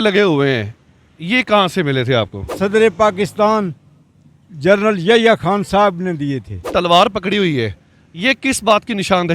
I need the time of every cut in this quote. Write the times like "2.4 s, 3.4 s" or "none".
2.4 s, 6.6 s